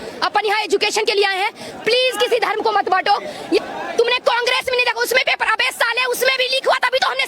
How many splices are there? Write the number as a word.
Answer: one